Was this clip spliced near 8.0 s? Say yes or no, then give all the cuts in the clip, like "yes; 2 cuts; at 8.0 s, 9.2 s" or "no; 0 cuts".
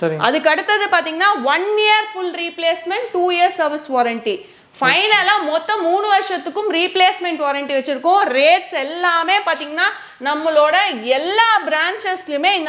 no; 0 cuts